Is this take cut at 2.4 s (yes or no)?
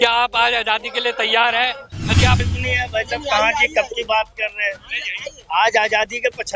yes